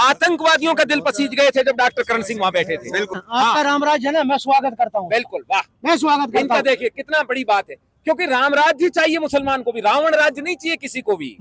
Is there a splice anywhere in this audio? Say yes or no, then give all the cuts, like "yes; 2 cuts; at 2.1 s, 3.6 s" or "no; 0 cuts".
yes; 1 cut; at 3.2 s